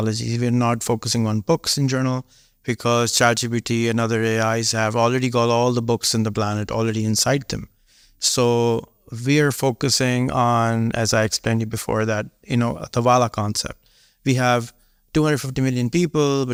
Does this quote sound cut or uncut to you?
uncut